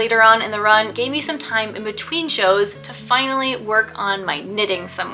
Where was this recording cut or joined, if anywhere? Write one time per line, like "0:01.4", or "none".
none